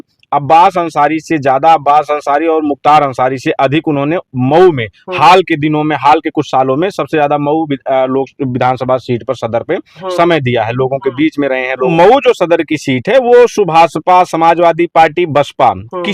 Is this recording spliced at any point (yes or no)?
yes